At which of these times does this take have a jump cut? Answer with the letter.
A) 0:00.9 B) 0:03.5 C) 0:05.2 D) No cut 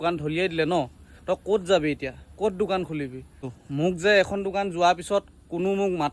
B